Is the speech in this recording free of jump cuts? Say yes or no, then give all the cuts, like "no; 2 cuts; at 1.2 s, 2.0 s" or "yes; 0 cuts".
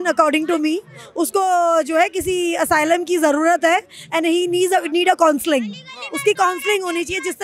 yes; 0 cuts